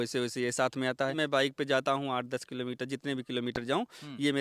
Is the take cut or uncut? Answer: cut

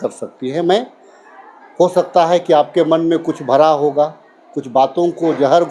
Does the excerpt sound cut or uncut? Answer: uncut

